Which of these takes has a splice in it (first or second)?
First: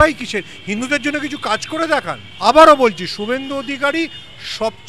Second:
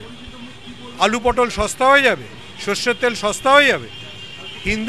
first